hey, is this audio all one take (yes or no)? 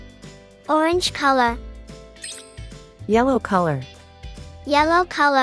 yes